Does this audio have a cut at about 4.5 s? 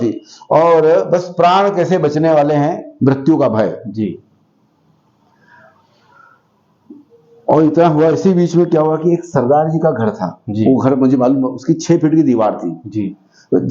no; 0 cuts

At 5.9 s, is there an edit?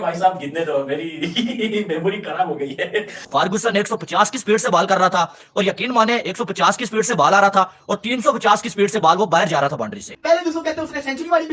no; 2 cuts; at 3.1 s, 10.1 s

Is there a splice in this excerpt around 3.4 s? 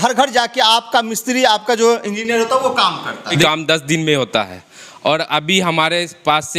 yes; 1 cut; at 3.4 s

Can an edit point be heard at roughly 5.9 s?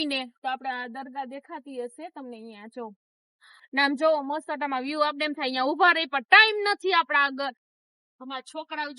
no; 2 cuts; at 3.6 s, 7.7 s

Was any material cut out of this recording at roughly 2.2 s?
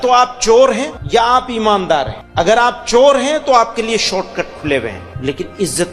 yes; 3 cuts; at 0.9 s, 2.2 s, 5.1 s

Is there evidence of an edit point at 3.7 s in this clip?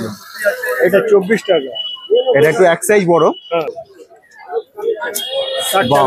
yes; 1 cut; at 3.7 s

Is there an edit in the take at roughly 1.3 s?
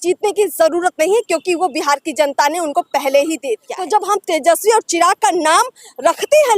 no; 1 cut; at 3.7 s

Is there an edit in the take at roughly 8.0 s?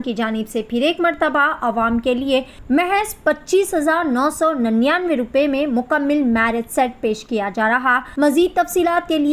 yes; 2 cuts; at 2.5 s, 8.0 s

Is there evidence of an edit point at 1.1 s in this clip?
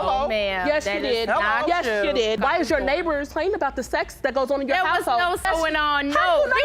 no; 1 cut; at 2.4 s

